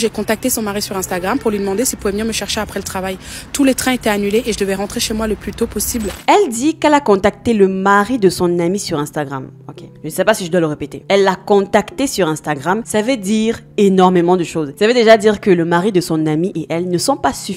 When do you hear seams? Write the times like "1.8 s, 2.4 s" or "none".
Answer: none